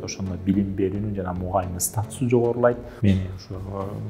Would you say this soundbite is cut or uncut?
cut